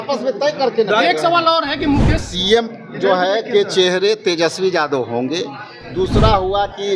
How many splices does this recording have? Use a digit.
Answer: 1